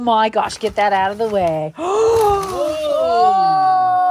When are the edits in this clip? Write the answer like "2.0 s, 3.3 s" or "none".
none